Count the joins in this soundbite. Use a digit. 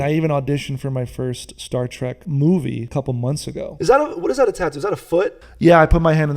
3